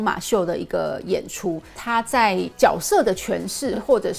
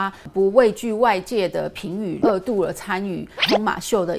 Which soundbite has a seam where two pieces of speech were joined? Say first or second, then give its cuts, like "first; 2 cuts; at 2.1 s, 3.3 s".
first; 1 cut; at 1.7 s